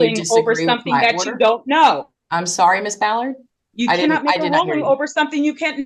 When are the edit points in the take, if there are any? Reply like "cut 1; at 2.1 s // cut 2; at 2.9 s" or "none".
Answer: none

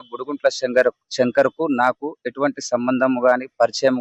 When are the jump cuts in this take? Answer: none

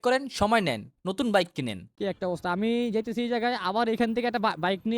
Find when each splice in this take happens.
cut 1; at 1.8 s

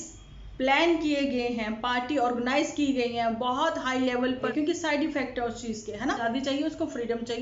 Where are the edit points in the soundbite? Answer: cut 1; at 4.5 s // cut 2; at 6.2 s

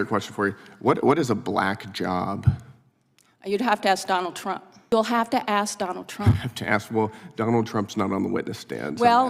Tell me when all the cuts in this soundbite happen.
cut 1; at 4.7 s

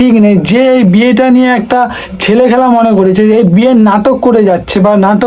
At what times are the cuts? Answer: none

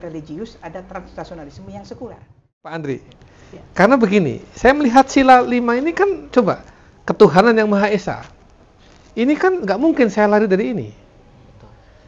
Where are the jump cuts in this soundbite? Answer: cut 1; at 2.7 s

